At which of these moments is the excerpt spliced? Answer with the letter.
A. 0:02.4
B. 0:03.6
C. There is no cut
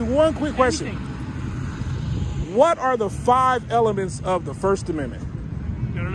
C